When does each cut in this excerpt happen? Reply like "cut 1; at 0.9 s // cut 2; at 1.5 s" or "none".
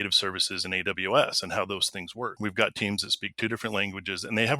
cut 1; at 2.3 s